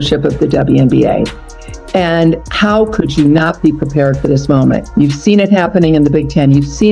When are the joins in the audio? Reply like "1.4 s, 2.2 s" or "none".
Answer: none